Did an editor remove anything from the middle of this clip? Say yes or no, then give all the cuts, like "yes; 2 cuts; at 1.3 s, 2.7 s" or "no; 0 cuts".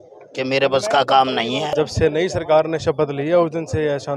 yes; 1 cut; at 1.7 s